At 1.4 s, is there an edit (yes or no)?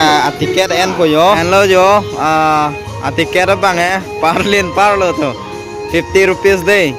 yes